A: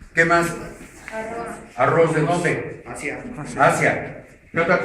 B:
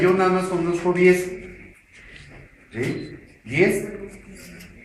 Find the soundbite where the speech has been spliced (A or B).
A